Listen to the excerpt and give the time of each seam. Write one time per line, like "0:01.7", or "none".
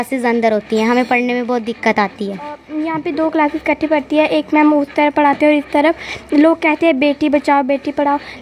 0:02.6